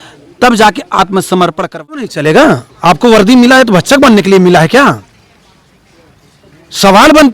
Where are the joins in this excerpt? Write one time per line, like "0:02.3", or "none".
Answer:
0:02.0

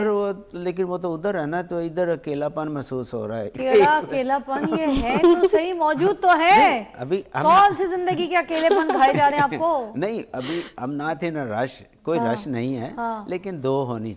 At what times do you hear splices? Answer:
none

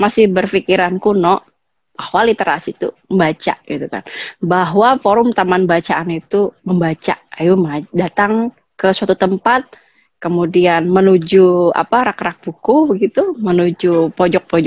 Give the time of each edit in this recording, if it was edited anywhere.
none

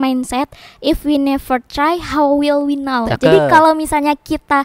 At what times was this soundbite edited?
0:03.1

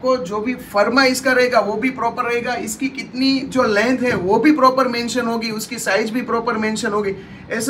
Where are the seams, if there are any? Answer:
none

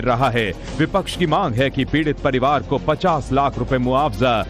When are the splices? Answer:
0:03.1

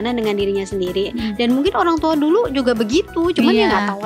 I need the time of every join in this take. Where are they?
none

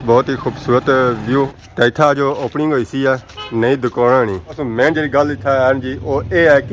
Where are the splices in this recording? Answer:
0:01.6
0:04.6

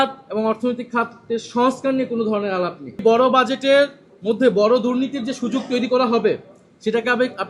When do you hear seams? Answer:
0:03.0

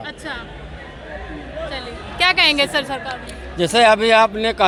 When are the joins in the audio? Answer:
none

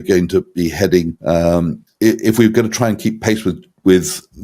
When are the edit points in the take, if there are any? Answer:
0:01.1
0:01.8

